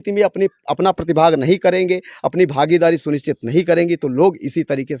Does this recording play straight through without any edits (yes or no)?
yes